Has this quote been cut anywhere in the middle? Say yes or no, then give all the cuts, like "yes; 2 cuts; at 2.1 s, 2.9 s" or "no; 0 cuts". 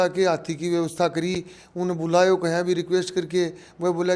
no; 0 cuts